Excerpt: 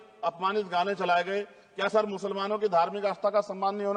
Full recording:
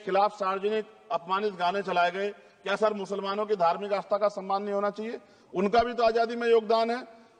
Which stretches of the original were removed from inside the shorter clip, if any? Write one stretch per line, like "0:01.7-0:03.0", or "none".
none